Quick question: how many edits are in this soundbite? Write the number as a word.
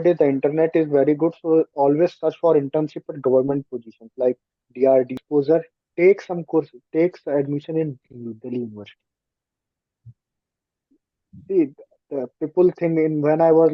one